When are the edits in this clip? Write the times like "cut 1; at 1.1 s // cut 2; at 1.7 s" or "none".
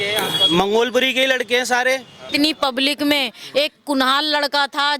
cut 1; at 2.2 s